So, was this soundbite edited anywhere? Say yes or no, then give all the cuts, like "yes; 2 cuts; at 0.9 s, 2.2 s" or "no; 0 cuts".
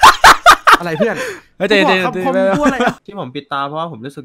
yes; 1 cut; at 3.0 s